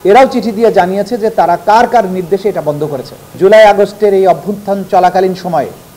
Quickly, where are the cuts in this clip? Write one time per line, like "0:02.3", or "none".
0:03.3